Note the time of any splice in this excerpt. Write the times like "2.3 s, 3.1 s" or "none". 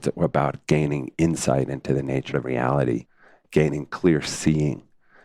2.3 s, 3.3 s